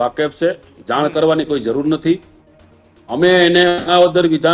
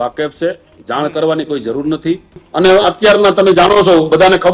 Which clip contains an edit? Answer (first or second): second